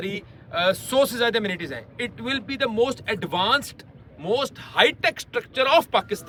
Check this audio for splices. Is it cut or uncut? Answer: uncut